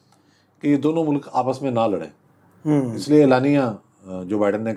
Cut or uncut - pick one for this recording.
uncut